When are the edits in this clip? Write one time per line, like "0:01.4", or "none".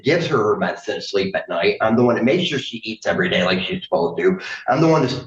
none